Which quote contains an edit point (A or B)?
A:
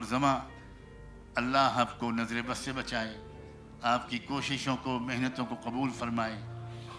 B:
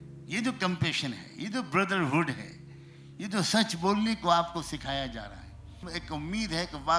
B